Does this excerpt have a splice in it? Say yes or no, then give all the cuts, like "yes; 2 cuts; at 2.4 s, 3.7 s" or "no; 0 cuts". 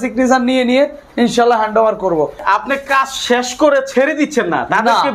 yes; 1 cut; at 2.4 s